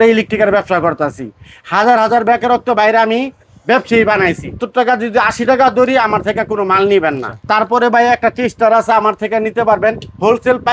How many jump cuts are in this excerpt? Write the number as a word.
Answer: zero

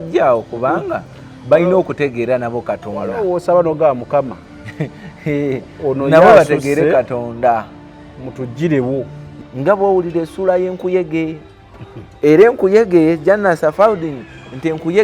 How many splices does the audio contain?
one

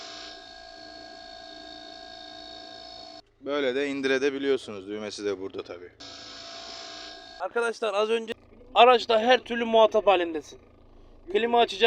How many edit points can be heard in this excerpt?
one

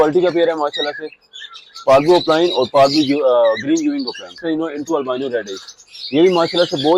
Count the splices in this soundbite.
one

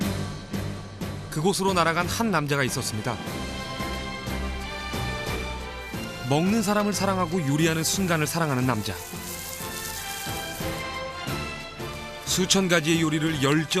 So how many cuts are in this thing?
one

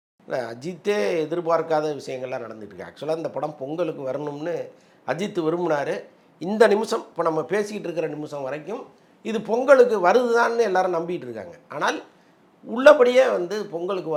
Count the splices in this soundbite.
zero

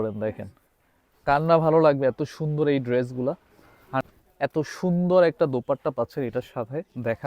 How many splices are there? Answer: one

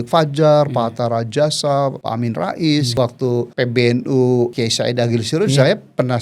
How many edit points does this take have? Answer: three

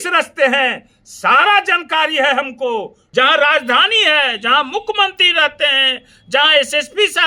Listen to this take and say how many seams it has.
one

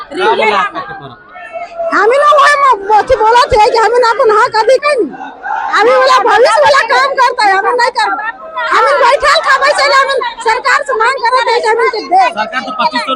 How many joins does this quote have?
one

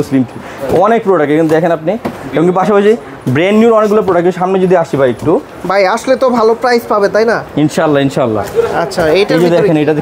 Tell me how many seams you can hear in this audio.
zero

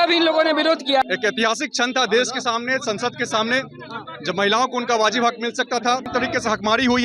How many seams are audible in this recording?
two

